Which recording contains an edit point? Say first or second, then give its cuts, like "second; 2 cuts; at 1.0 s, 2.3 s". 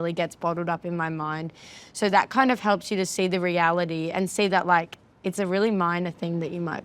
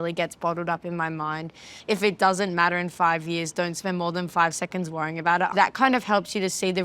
second; 2 cuts; at 1.7 s, 5.5 s